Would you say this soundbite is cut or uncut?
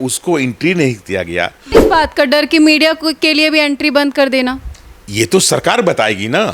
cut